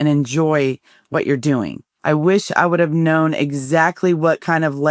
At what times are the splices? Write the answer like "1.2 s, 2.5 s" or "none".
1.8 s